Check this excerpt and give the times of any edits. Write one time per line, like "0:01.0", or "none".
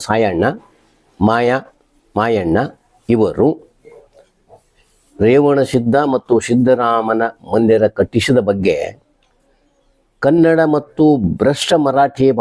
none